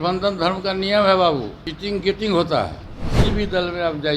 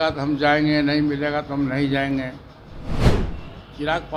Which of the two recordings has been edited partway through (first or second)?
first